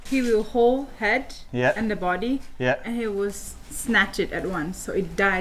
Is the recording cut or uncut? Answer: uncut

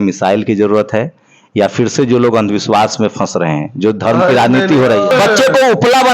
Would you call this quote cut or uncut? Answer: cut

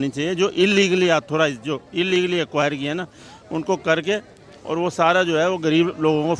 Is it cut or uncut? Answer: uncut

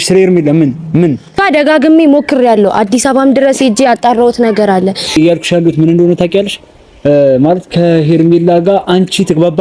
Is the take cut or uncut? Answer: cut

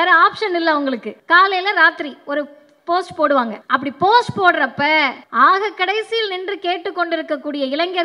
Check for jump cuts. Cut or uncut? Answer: cut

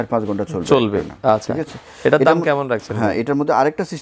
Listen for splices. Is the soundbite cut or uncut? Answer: uncut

